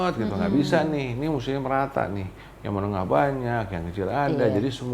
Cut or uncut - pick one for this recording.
uncut